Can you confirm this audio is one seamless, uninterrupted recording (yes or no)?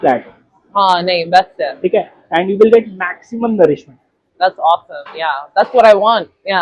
yes